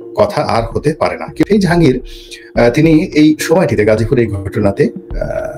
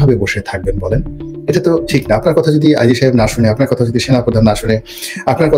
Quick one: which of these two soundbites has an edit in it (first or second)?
first